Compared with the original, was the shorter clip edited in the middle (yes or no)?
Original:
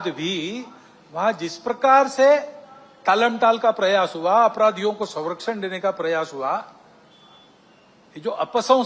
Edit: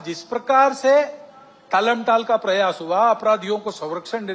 no